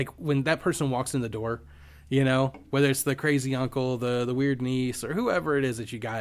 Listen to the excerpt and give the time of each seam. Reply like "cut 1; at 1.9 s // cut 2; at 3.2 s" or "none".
none